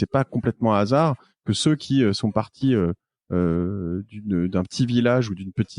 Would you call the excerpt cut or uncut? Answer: uncut